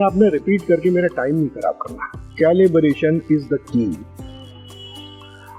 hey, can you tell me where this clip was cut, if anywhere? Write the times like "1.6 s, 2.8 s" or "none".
2.2 s